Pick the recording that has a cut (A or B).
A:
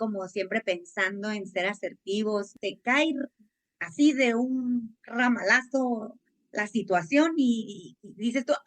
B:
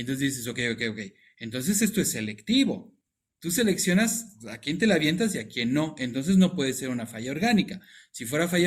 A